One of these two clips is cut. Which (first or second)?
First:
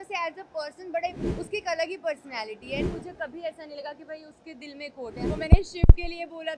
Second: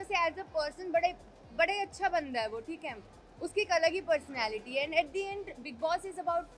first